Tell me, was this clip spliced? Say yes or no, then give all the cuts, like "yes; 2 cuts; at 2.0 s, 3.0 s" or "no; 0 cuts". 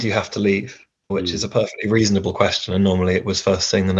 yes; 1 cut; at 1.1 s